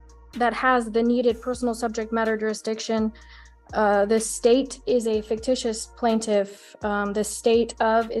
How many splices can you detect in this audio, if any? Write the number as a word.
zero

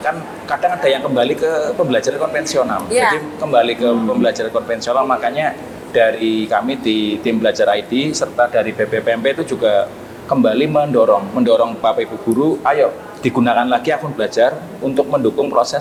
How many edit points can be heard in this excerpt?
zero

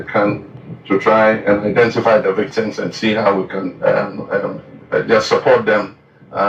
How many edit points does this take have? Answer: one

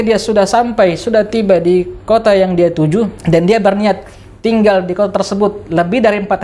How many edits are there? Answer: one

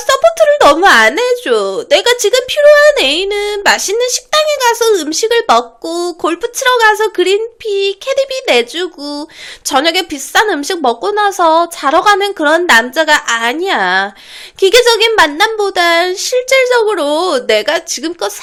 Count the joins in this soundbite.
zero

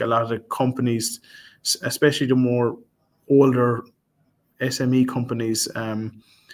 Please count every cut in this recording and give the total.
zero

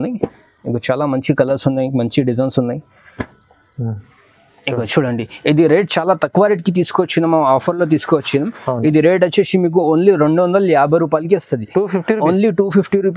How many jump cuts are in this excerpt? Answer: zero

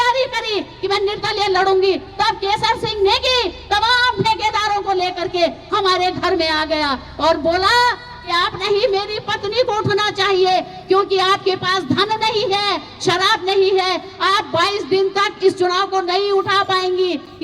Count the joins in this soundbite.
zero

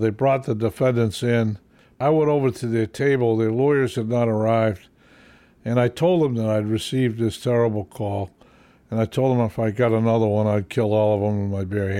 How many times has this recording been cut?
one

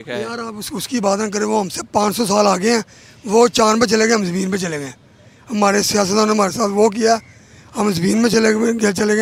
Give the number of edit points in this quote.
zero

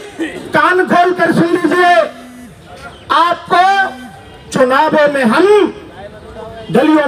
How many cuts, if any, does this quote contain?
zero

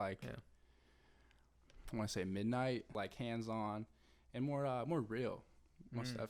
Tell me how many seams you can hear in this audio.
one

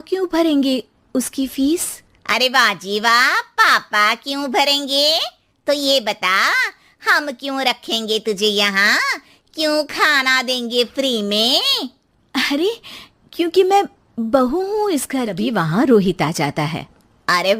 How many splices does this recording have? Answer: one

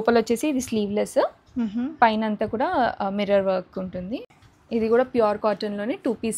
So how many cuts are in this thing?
one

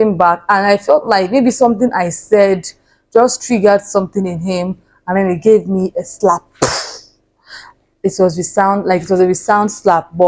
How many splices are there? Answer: zero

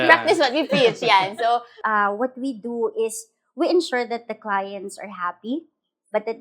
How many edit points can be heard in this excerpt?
one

